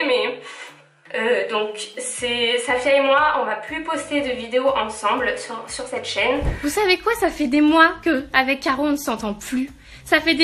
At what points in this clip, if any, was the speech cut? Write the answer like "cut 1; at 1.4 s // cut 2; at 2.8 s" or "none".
cut 1; at 6.5 s